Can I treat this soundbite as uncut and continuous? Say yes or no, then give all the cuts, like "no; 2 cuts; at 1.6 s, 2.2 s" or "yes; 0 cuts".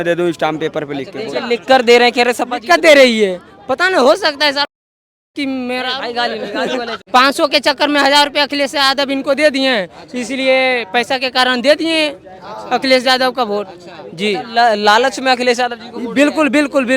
no; 1 cut; at 7.0 s